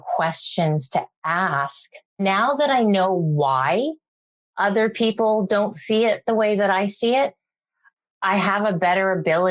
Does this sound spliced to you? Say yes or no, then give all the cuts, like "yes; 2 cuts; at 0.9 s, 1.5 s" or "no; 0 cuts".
yes; 1 cut; at 2.2 s